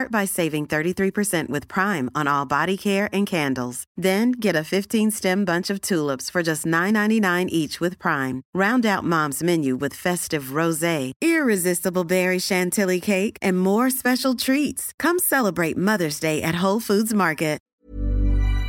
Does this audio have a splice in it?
yes; 1 cut; at 17.6 s

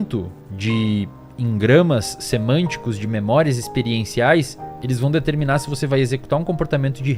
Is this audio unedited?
yes; 0 cuts

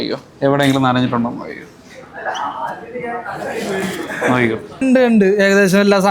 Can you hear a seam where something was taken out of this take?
yes; 1 cut; at 4.8 s

